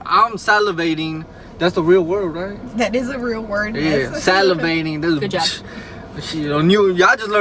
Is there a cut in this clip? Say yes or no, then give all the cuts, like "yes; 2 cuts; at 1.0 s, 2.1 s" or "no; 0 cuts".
no; 0 cuts